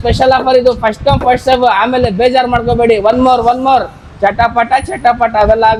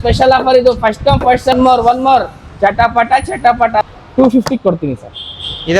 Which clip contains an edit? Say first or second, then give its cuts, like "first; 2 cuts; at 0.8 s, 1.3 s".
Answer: second; 2 cuts; at 1.5 s, 3.8 s